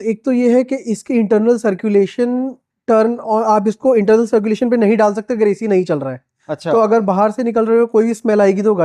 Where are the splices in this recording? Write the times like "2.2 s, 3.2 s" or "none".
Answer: none